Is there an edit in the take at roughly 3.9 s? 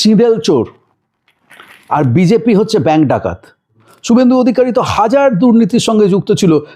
yes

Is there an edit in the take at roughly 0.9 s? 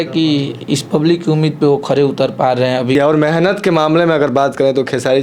no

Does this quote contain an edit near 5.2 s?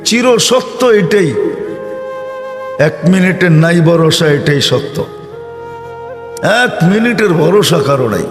yes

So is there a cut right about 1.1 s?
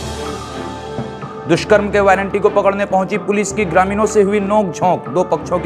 yes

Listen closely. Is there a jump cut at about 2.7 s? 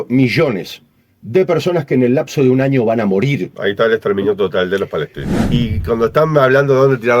no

